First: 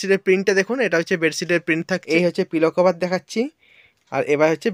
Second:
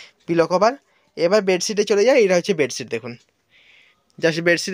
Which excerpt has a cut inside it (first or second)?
first